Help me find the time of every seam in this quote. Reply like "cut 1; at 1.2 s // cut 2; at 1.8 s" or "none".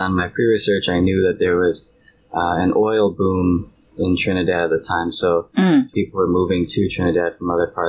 cut 1; at 5.9 s